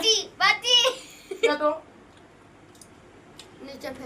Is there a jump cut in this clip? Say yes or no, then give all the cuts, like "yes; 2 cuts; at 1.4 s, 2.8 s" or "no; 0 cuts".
yes; 1 cut; at 1.5 s